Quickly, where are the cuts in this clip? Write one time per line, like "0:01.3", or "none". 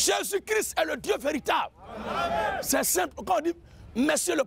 none